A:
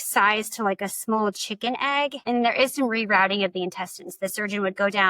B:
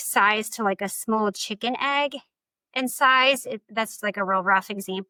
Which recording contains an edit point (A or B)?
A